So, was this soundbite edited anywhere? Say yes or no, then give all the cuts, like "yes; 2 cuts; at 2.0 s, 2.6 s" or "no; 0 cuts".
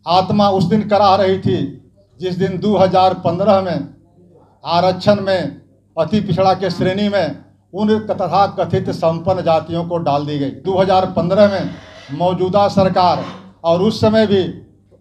yes; 1 cut; at 10.6 s